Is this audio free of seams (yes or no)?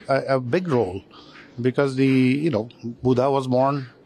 yes